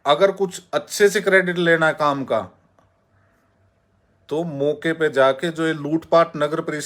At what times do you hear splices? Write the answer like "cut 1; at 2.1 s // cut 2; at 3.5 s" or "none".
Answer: none